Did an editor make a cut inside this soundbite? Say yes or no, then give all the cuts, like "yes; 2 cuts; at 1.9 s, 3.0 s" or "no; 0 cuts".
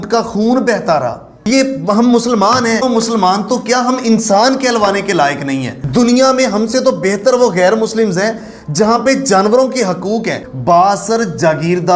yes; 4 cuts; at 1.3 s, 2.8 s, 5.8 s, 10.4 s